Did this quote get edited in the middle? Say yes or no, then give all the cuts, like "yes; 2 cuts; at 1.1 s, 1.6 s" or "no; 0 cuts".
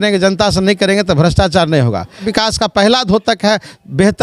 yes; 1 cut; at 2.2 s